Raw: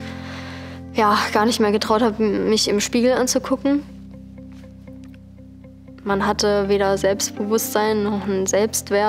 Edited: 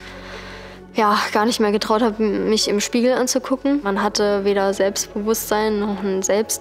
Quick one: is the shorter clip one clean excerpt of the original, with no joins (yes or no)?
no